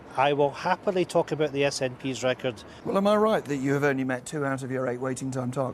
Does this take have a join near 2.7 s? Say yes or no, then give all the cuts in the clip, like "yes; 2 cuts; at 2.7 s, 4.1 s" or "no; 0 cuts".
yes; 1 cut; at 2.7 s